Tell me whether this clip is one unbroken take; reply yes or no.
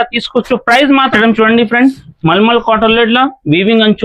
no